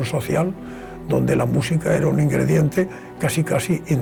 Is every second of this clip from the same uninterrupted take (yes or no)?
yes